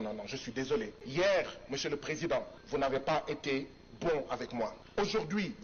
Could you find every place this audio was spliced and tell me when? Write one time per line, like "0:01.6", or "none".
0:01.0
0:02.6
0:04.8